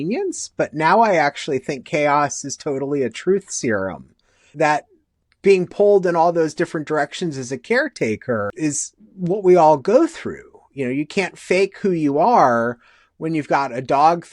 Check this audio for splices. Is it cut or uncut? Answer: cut